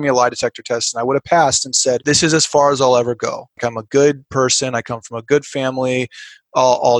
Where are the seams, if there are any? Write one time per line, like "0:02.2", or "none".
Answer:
0:02.0
0:03.6